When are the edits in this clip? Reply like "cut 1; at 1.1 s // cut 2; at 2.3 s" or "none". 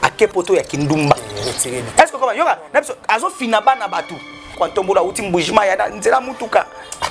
cut 1; at 4.4 s